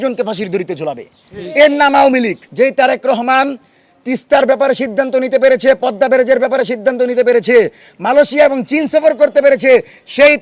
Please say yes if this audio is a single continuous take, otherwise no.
no